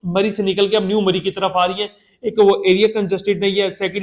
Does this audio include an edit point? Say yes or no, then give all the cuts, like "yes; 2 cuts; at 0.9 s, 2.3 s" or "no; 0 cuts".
no; 0 cuts